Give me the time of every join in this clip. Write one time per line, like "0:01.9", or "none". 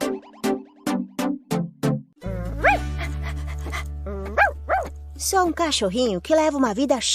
0:02.1